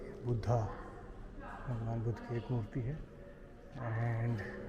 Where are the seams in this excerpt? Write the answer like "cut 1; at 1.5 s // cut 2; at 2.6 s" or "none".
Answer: none